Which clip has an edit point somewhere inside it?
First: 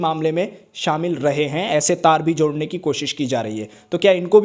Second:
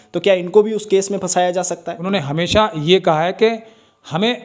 second; 1 cut; at 1.9 s

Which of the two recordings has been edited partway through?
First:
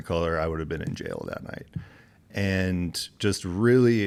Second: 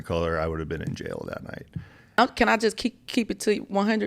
second; 1 cut; at 2.2 s

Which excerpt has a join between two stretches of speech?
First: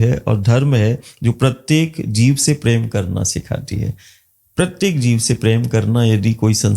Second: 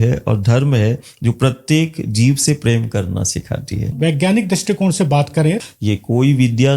second; 2 cuts; at 4.0 s, 5.6 s

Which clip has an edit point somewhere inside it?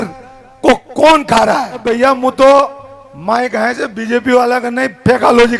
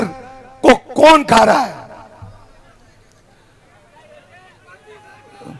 first; 1 cut; at 1.9 s

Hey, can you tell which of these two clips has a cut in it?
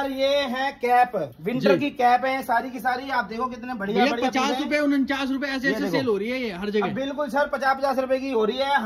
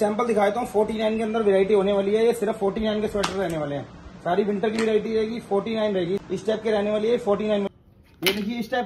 second; 2 cuts; at 6.2 s, 7.7 s

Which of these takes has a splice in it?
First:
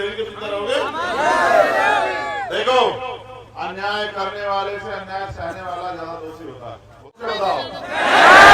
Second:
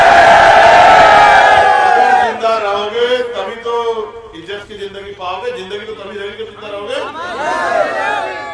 first; 1 cut; at 7.2 s

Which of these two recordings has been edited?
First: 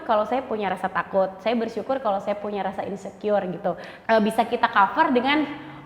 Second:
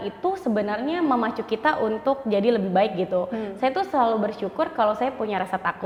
first; 1 cut; at 3.9 s

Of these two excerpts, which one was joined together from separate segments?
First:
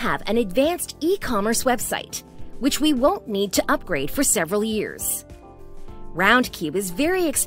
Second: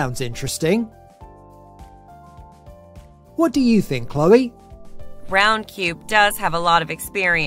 second; 2 cuts; at 0.9 s, 3.2 s

